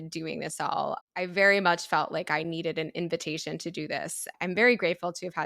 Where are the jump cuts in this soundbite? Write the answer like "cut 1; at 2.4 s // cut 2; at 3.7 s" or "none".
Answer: cut 1; at 4.3 s